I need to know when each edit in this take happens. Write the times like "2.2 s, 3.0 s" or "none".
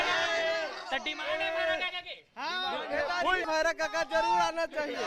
3.5 s